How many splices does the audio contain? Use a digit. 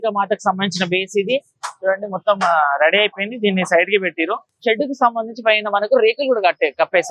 1